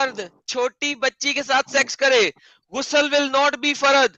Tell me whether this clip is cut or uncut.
uncut